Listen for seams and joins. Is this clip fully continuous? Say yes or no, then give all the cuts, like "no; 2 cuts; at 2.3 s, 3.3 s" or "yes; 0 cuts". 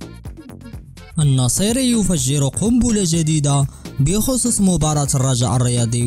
no; 1 cut; at 1.1 s